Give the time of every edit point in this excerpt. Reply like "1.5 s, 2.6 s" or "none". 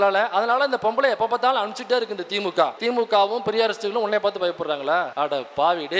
2.8 s, 5.1 s

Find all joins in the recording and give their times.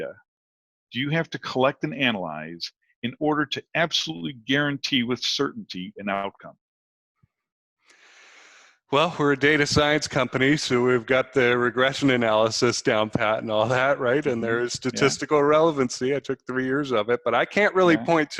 none

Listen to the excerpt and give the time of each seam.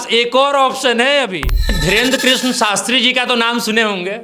1.8 s

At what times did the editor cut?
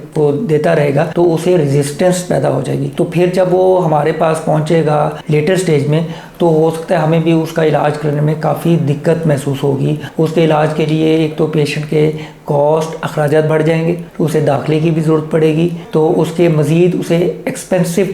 none

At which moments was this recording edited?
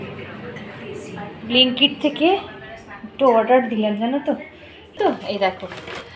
5.0 s

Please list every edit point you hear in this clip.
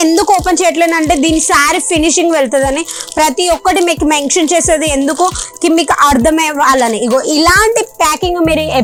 none

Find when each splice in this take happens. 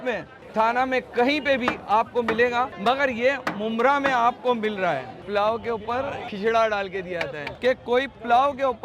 5.2 s, 6.3 s, 7.6 s

